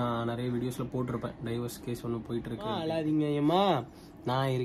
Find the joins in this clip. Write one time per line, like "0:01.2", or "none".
0:02.9